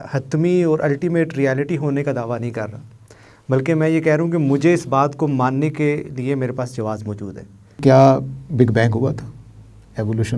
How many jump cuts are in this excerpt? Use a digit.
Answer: 1